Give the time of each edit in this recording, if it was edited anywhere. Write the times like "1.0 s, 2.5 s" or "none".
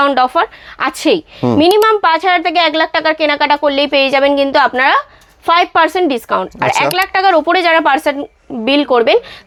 none